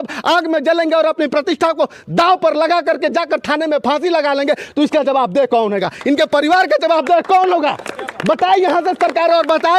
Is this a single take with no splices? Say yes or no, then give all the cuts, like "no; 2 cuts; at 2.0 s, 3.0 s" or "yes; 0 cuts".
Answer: yes; 0 cuts